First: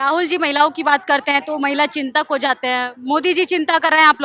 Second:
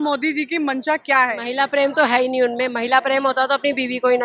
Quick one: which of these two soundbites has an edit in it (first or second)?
second